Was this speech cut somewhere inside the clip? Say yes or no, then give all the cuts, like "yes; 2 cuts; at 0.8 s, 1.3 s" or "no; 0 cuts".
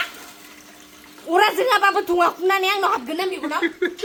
no; 0 cuts